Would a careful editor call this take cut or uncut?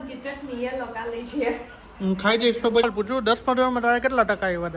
cut